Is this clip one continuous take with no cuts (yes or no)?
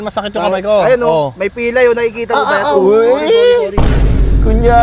yes